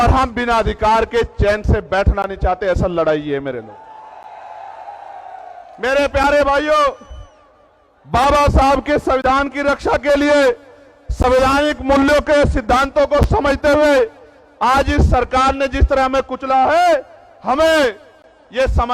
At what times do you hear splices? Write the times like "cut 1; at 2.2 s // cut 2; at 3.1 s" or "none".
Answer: none